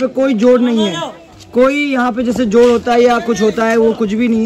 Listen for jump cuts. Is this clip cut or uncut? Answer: uncut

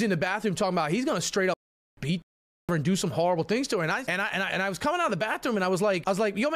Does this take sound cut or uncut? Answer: uncut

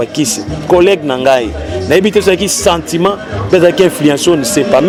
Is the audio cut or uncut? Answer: uncut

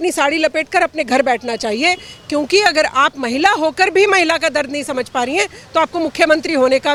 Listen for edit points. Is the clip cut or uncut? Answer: uncut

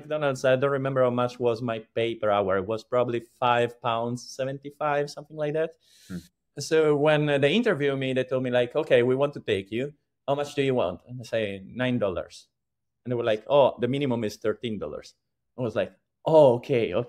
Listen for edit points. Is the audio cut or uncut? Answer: cut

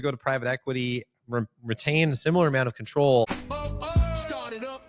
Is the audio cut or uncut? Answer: cut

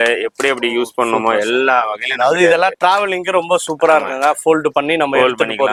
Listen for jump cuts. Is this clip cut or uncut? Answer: uncut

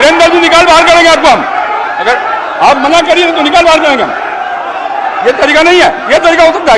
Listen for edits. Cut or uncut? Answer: uncut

